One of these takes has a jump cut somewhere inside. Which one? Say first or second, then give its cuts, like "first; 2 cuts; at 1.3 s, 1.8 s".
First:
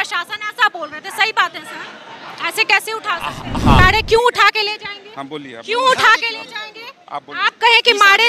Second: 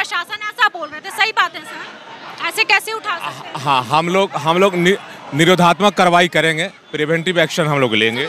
first; 1 cut; at 3.8 s